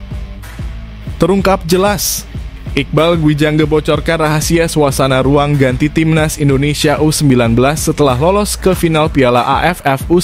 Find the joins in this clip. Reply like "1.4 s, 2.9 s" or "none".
1.2 s